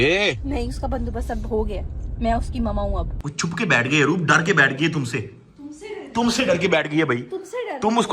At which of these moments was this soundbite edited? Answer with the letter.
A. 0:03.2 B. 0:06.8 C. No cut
A